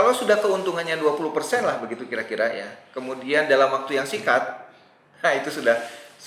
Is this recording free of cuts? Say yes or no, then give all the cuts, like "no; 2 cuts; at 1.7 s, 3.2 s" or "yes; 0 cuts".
yes; 0 cuts